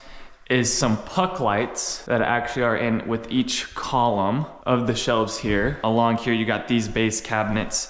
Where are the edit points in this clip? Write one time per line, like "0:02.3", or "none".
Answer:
none

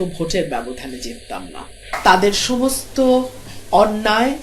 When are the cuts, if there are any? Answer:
0:01.9

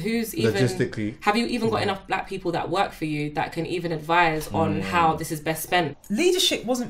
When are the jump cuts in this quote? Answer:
0:06.0

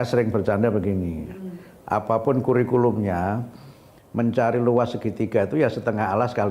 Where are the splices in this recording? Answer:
none

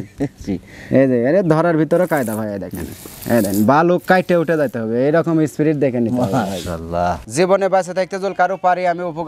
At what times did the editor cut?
0:07.2

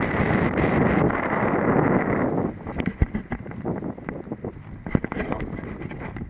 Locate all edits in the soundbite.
none

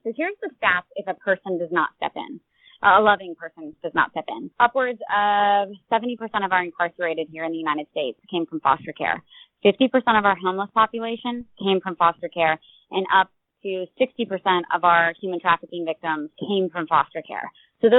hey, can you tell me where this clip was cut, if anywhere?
0:04.5
0:16.3

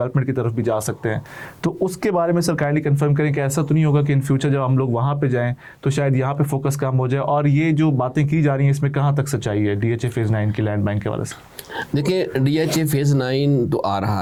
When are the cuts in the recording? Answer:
none

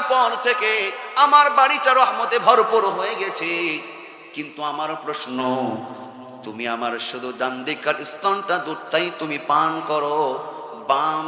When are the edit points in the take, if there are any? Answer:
none

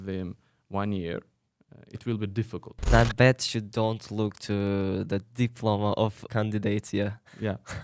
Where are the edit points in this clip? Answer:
0:02.9
0:06.2

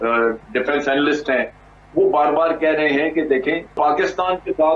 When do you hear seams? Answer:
0:03.8

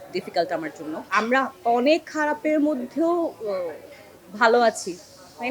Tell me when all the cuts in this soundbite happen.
0:01.0

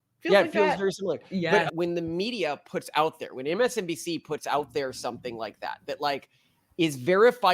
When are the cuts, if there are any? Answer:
0:01.7

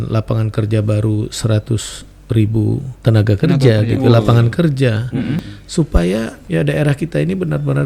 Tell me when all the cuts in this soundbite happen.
0:02.9
0:05.5
0:06.4

